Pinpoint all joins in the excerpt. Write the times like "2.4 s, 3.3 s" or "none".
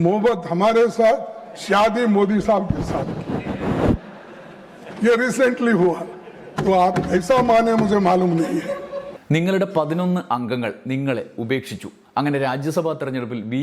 9.1 s

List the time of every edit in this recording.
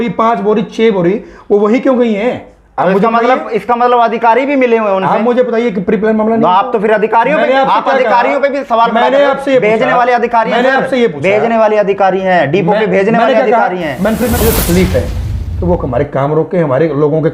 14.4 s

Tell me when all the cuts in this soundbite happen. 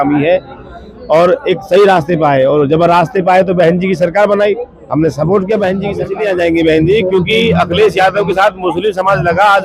6.0 s

